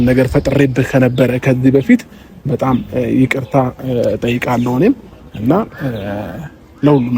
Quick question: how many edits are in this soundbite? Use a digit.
0